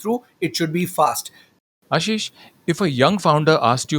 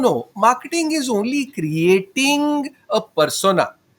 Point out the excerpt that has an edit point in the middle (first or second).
first